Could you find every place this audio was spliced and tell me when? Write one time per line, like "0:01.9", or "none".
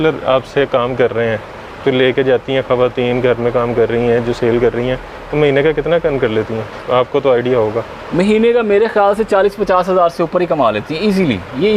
none